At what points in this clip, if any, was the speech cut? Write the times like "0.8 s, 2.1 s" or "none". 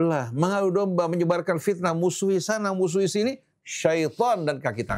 none